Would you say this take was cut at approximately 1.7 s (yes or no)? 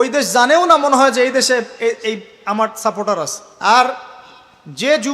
no